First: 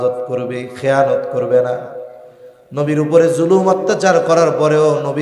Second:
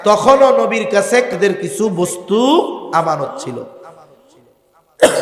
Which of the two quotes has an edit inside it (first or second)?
second